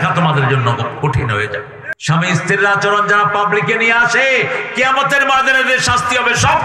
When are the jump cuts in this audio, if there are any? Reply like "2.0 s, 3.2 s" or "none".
1.8 s